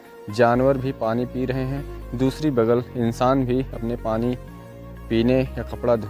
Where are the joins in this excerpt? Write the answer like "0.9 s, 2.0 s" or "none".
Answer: none